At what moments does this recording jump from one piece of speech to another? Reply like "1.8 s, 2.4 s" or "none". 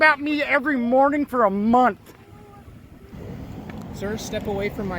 3.1 s